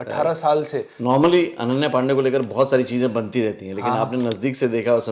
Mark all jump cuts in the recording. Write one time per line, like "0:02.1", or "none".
0:00.9